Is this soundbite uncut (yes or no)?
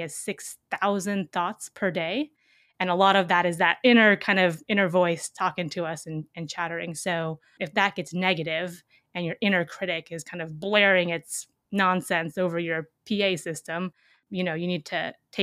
no